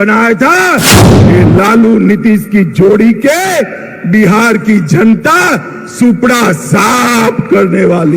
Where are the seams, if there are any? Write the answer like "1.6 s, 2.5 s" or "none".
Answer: 1.0 s